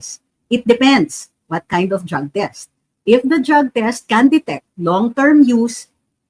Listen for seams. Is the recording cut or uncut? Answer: uncut